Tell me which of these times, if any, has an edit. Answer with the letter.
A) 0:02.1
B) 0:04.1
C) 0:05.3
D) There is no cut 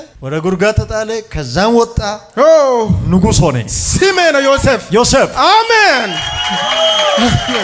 D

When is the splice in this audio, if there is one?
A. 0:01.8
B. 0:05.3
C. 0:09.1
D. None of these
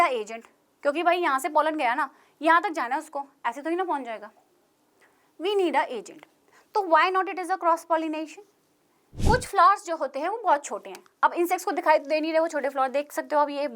C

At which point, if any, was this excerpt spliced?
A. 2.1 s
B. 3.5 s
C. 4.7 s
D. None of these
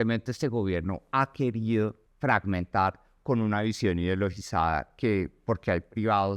A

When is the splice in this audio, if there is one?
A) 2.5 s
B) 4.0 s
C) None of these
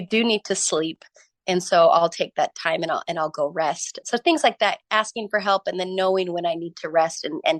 B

